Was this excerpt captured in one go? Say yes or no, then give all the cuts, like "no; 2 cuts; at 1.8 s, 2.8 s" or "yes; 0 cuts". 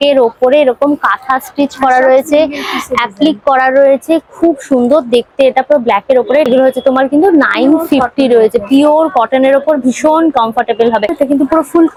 yes; 0 cuts